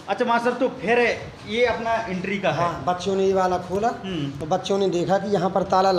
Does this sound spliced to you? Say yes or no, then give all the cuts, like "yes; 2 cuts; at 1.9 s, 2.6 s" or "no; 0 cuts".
no; 0 cuts